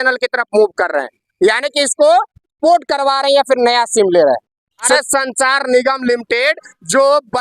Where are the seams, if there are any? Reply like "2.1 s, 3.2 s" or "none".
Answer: 5.0 s